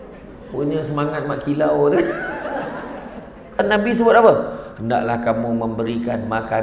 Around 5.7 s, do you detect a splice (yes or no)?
no